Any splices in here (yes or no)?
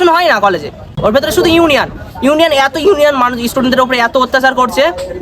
yes